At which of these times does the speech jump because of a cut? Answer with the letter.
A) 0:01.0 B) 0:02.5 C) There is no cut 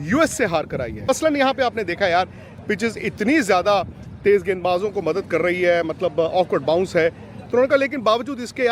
A